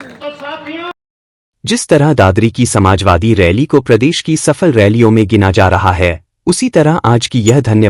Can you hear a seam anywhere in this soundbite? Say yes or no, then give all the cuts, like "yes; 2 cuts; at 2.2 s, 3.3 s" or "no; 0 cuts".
no; 0 cuts